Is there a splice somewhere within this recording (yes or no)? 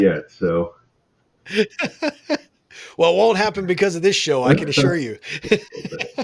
no